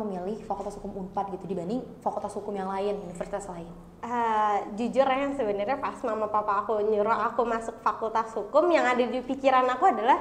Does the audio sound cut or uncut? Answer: uncut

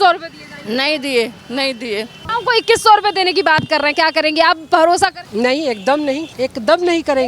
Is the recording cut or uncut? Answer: cut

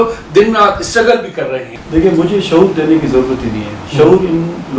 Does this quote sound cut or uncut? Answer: cut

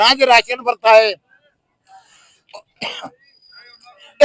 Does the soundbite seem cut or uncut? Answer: uncut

